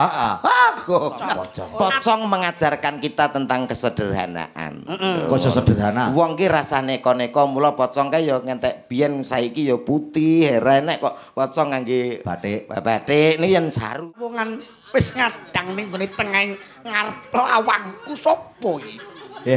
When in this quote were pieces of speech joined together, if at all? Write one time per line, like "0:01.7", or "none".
0:01.5
0:14.3